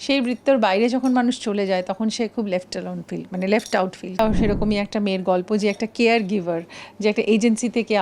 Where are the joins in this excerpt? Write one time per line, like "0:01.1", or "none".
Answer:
0:04.2